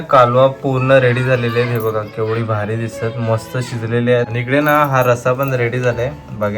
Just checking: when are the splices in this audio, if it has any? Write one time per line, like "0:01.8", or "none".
0:04.3